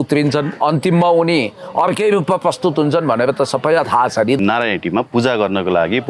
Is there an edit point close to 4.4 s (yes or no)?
yes